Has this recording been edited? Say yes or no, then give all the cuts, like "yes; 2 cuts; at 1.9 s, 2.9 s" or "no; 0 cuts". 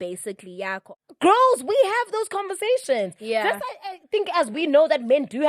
yes; 1 cut; at 0.9 s